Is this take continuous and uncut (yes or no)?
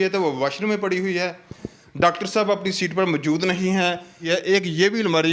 no